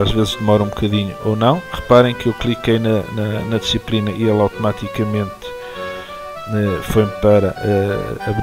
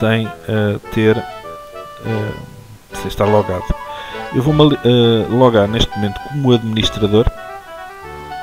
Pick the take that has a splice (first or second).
second